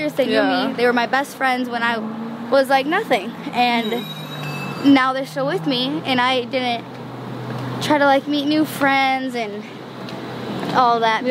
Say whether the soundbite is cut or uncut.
uncut